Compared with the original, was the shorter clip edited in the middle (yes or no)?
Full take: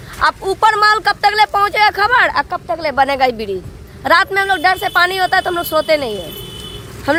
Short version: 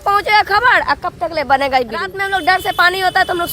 yes